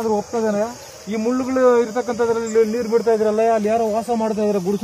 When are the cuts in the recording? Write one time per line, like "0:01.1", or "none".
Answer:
0:01.0